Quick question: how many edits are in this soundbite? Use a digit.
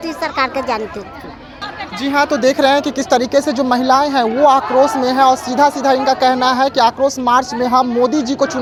0